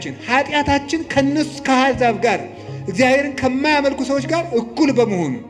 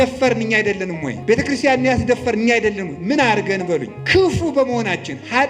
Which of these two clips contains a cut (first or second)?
second